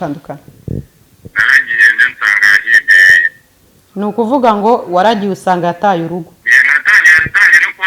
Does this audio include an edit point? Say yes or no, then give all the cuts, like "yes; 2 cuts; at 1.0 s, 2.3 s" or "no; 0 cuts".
yes; 1 cut; at 6.4 s